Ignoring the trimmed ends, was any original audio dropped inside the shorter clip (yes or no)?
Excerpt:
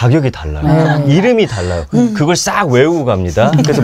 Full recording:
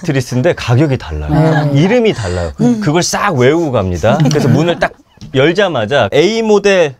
no